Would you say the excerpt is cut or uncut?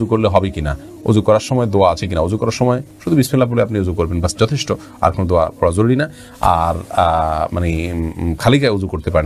uncut